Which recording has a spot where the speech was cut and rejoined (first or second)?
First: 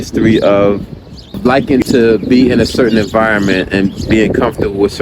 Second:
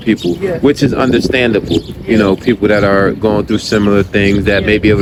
first